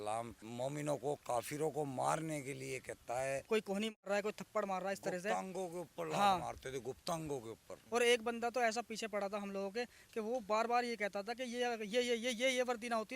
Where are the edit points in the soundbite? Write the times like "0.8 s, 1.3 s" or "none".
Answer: 3.4 s, 7.7 s